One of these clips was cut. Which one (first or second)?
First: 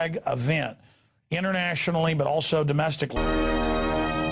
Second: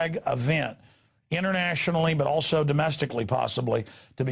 second